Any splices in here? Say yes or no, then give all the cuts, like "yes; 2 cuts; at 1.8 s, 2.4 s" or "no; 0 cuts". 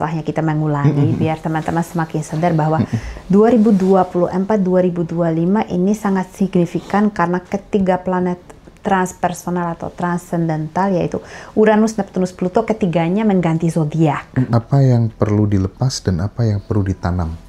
yes; 1 cut; at 14.5 s